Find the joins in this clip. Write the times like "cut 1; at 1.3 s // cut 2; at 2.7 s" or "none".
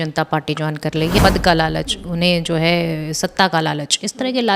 cut 1; at 1.2 s